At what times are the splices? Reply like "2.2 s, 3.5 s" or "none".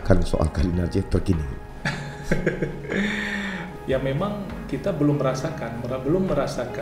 3.6 s